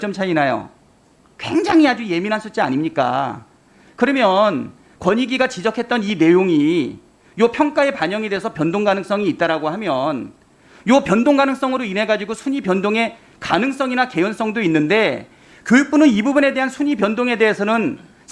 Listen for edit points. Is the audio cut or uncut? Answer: uncut